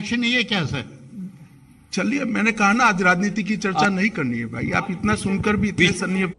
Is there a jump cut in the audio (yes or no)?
no